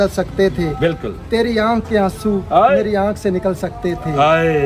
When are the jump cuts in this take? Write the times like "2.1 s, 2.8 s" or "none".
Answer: none